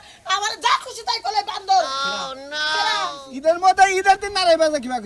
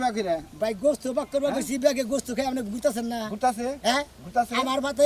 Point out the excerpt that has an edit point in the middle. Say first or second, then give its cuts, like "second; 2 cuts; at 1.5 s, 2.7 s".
first; 1 cut; at 3.3 s